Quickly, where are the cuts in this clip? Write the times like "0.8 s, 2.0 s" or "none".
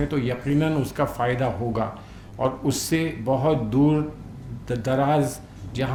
none